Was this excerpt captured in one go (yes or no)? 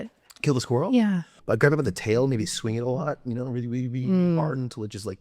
no